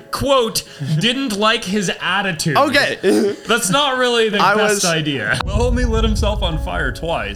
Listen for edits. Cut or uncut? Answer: cut